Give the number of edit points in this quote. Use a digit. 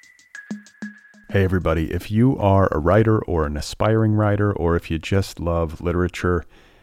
1